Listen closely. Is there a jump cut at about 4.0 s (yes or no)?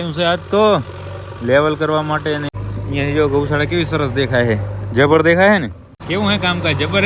no